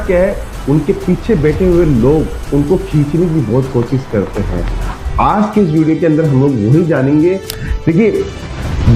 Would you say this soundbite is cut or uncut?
cut